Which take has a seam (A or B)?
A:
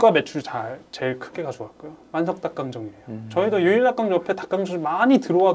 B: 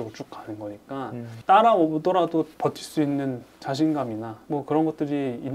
B